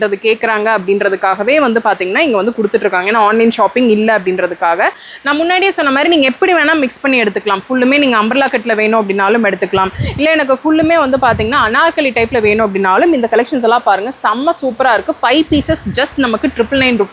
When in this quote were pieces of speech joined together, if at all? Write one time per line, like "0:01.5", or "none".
0:05.1